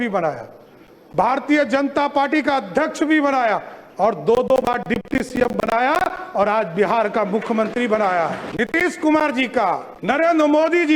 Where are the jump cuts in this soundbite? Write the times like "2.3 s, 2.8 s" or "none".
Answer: 8.4 s, 9.9 s